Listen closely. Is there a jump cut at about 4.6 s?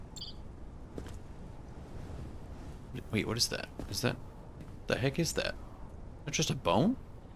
yes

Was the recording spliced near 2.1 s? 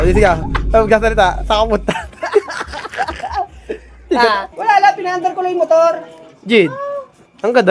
no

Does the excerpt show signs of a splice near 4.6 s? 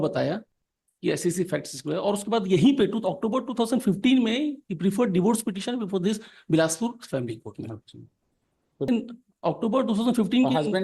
no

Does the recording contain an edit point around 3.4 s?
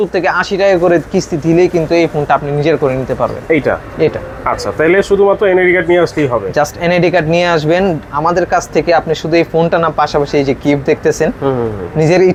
no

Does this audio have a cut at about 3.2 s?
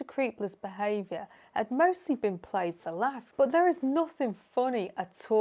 yes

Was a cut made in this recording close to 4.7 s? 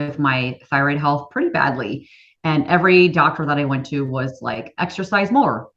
no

